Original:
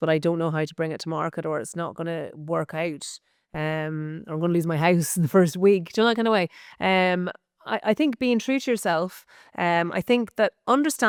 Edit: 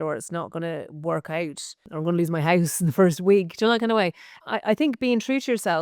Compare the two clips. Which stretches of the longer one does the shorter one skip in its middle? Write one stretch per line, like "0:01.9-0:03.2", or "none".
0:03.3-0:04.2
0:06.6-0:07.5